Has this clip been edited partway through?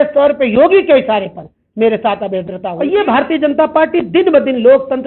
yes; 1 cut; at 2.6 s

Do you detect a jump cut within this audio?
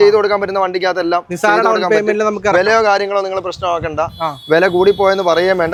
no; 0 cuts

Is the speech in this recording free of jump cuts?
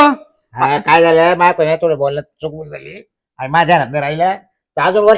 yes; 0 cuts

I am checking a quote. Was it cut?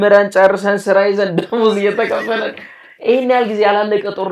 no; 0 cuts

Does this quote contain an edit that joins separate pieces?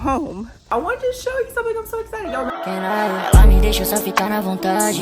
yes; 2 cuts; at 0.7 s, 2.5 s

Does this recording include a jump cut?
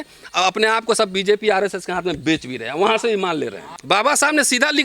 yes; 1 cut; at 3.7 s

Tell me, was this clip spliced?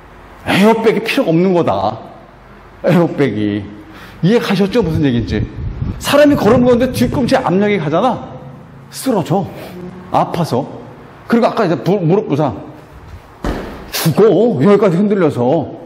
no; 0 cuts

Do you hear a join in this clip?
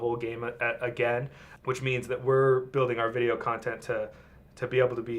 yes; 1 cut; at 1.4 s

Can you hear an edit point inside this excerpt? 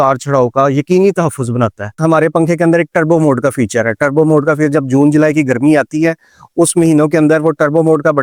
yes; 1 cut; at 1.9 s

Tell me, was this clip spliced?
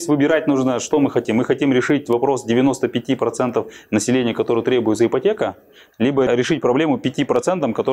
no; 0 cuts

